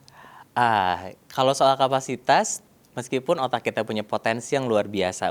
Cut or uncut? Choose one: uncut